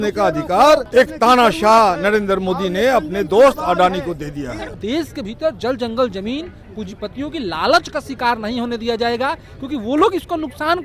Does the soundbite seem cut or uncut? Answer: cut